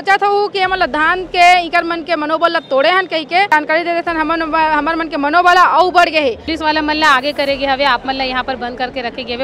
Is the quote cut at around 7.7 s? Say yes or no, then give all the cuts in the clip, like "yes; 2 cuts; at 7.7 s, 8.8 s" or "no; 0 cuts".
no; 2 cuts; at 3.5 s, 6.5 s